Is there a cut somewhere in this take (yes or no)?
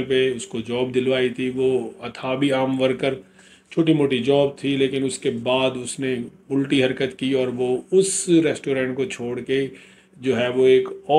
no